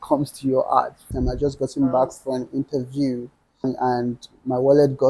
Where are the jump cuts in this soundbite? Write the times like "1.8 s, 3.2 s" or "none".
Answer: 1.1 s, 3.6 s